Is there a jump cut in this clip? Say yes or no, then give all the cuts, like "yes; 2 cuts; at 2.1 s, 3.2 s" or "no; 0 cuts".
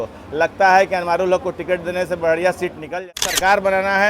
yes; 1 cut; at 2.9 s